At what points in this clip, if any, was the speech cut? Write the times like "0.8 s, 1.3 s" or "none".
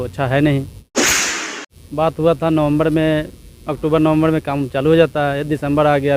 1.3 s